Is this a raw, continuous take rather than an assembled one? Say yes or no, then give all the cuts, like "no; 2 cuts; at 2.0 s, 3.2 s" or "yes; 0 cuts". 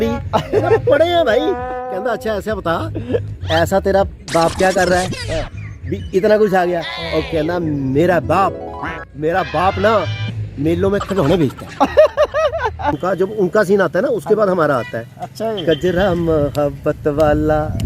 no; 1 cut; at 13.0 s